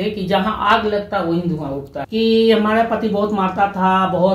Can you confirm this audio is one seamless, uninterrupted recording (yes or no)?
no